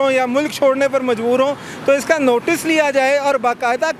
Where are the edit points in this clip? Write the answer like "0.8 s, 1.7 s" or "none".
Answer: none